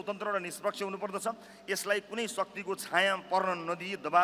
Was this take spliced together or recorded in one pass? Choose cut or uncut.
uncut